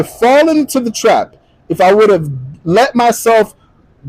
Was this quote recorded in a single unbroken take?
yes; 0 cuts

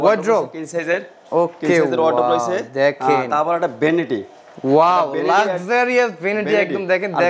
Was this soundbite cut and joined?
no; 0 cuts

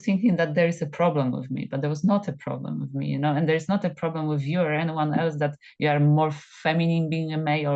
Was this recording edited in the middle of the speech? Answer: no; 0 cuts

